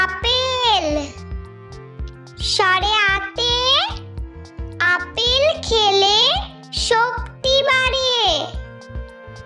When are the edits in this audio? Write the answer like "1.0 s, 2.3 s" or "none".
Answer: 8.5 s